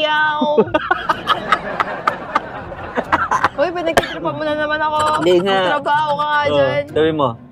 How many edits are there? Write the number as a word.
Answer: zero